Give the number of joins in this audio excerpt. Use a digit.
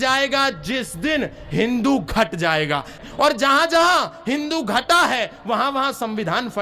1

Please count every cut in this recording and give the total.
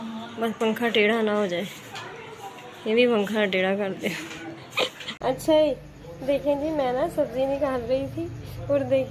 1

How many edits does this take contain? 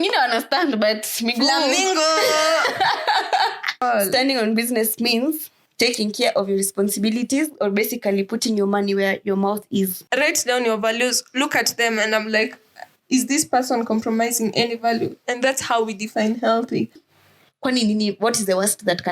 3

